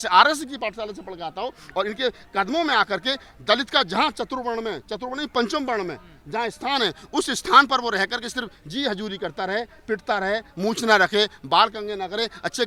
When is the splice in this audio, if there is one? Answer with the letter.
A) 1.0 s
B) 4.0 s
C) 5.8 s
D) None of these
D